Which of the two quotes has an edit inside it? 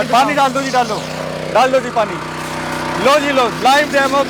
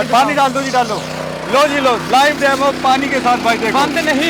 second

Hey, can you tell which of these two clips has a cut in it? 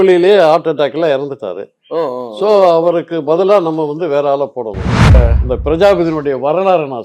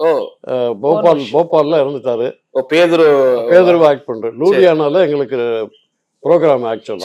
first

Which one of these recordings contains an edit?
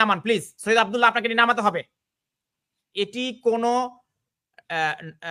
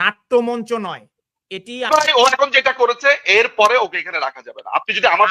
second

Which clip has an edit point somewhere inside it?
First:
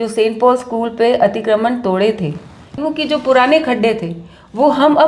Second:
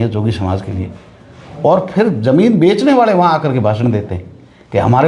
first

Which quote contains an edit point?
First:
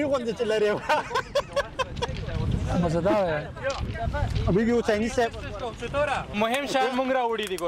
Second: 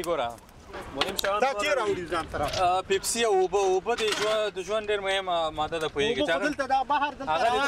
first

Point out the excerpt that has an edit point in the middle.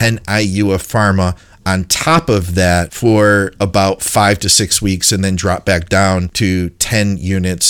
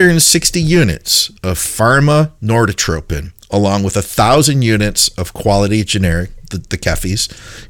first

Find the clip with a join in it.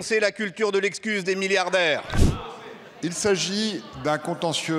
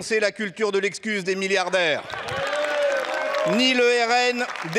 first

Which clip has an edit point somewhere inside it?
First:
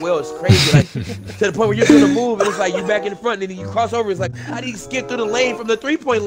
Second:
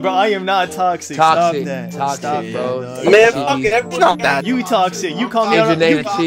first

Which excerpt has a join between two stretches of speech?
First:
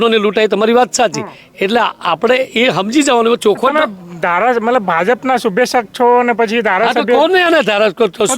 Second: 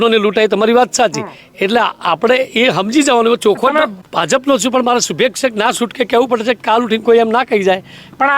second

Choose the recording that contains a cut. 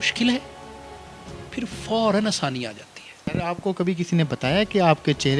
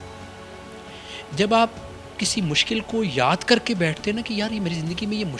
first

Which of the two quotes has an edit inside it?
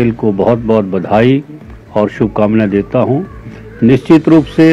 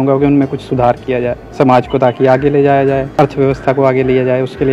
second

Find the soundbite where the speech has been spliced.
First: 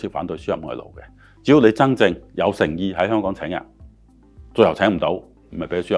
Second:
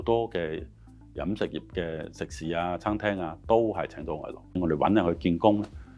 second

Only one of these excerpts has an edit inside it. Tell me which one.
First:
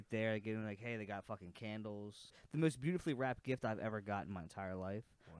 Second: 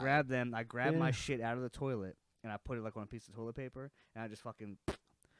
first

